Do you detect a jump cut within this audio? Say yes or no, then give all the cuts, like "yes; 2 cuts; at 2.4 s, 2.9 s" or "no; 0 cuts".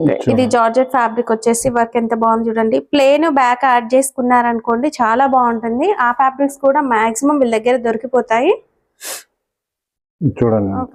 no; 0 cuts